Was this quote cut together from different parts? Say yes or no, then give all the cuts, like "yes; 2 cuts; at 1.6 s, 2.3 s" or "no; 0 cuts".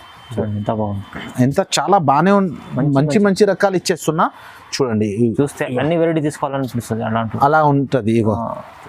no; 0 cuts